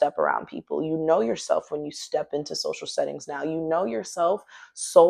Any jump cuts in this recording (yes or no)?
no